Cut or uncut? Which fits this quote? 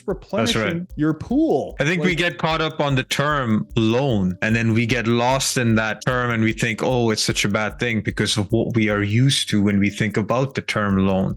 cut